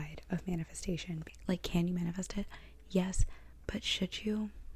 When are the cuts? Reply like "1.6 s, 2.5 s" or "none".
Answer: 1.3 s